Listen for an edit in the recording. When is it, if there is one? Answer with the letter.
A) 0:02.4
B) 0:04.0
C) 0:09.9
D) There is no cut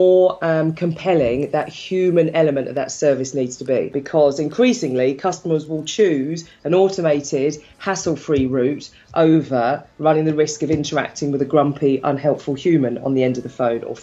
B